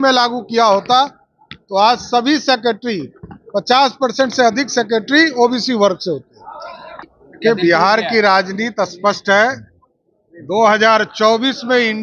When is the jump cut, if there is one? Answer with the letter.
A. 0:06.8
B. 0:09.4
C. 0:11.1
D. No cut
A